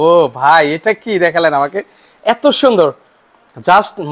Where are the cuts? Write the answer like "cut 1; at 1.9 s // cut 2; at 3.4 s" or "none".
none